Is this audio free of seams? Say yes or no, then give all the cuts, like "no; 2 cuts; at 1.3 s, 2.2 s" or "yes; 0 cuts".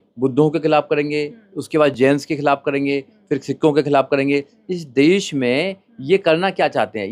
yes; 0 cuts